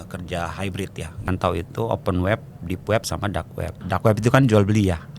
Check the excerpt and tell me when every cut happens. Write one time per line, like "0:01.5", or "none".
0:01.3
0:03.7